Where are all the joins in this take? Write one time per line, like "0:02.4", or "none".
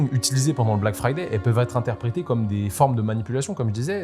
none